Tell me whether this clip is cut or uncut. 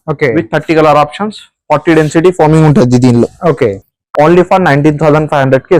uncut